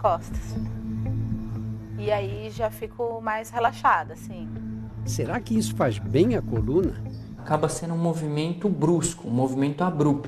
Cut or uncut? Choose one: cut